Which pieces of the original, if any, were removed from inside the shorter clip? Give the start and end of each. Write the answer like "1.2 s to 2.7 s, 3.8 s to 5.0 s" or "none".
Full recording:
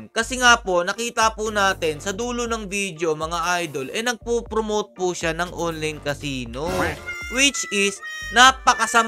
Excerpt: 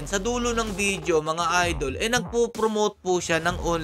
none